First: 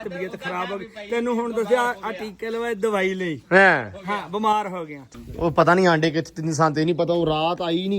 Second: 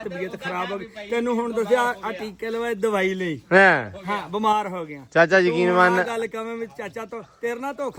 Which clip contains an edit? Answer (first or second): first